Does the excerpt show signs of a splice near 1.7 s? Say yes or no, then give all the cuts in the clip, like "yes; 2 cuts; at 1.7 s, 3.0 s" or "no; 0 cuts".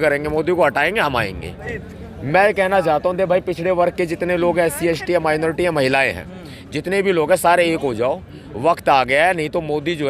yes; 1 cut; at 1.7 s